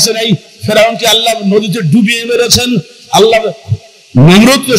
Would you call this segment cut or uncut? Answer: uncut